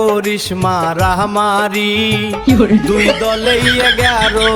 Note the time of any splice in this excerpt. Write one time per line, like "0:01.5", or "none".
none